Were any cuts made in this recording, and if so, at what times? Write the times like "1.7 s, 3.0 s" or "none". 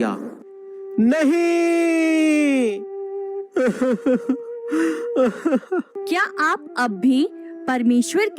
5.9 s